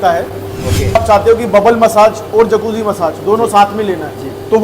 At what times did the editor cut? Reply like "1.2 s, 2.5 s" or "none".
1.0 s